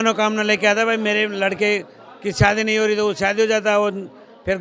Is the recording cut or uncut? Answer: uncut